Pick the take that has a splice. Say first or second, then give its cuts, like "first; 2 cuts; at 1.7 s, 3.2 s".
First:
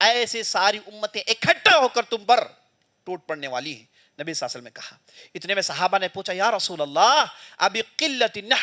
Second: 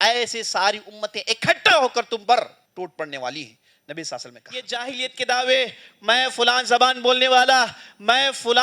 second; 2 cuts; at 2.6 s, 4.8 s